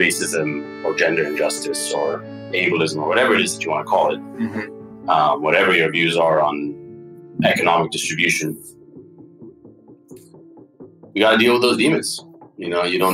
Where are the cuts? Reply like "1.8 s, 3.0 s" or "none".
none